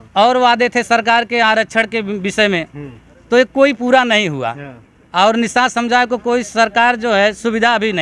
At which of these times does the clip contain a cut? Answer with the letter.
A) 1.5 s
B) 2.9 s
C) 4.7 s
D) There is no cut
D